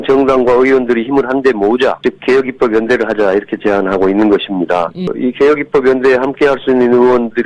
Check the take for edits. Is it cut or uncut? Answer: cut